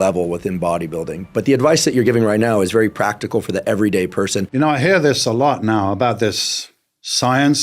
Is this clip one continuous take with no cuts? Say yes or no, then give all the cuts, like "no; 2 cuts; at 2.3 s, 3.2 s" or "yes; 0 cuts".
no; 1 cut; at 4.4 s